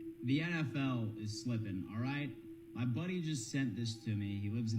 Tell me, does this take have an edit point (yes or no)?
yes